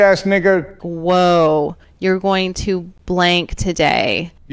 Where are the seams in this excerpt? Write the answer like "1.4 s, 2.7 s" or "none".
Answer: 2.9 s